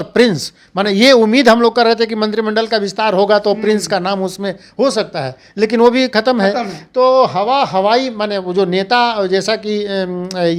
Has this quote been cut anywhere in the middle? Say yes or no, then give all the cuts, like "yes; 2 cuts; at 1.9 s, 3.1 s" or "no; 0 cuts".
no; 0 cuts